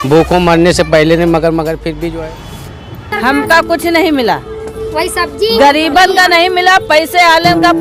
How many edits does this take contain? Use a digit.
1